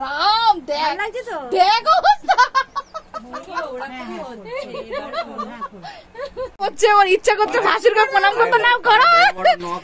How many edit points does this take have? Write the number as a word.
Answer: one